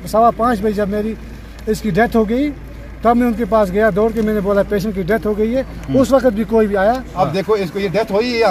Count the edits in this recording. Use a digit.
1